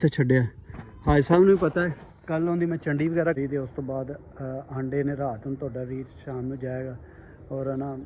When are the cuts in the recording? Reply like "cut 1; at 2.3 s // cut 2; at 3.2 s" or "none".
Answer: cut 1; at 3.4 s